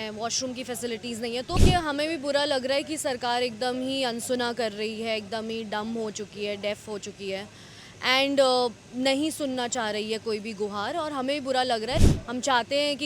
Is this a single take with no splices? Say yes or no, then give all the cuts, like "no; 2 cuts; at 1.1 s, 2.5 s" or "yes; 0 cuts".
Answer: no; 2 cuts; at 1.6 s, 12.0 s